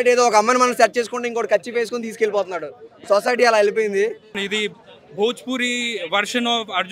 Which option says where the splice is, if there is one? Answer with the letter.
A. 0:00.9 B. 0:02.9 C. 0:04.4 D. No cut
C